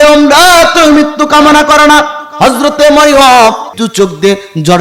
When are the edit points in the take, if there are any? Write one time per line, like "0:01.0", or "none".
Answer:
0:03.7